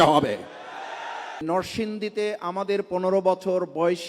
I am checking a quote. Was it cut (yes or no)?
yes